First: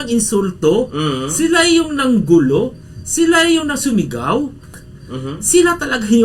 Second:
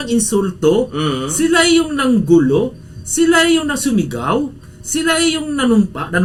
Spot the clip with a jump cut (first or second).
first